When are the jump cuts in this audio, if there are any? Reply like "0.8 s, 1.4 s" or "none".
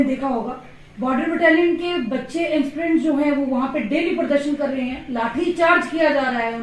none